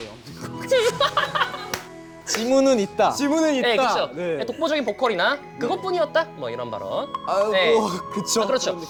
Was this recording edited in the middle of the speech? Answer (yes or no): no